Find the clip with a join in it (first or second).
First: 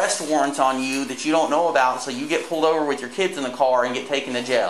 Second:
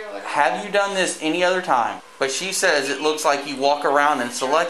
second